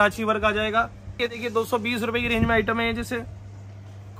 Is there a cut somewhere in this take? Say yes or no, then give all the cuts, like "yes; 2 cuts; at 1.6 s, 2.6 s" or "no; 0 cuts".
yes; 1 cut; at 1.2 s